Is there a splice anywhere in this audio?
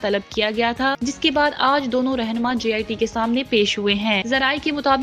no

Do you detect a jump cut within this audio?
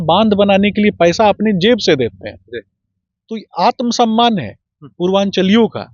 no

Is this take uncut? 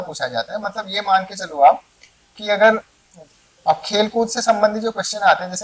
no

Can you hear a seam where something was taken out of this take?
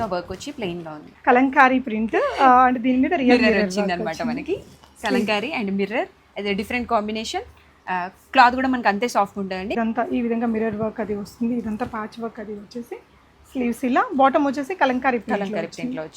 yes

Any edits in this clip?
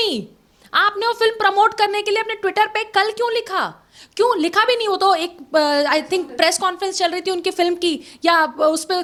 no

